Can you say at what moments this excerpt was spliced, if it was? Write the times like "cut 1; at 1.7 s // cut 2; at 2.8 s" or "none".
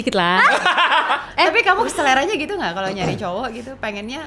cut 1; at 1.3 s